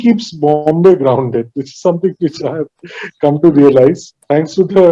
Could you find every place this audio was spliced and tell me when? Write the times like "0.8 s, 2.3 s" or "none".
none